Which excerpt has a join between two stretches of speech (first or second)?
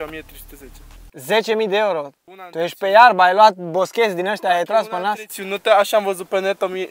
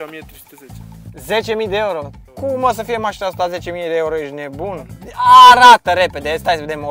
second